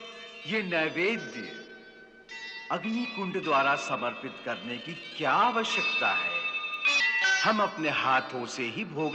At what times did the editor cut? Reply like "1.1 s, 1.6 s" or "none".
7.0 s